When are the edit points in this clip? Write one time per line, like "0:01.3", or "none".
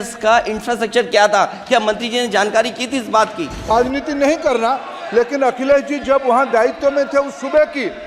0:03.7